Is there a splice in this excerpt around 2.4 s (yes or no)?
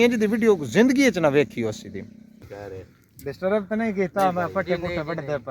yes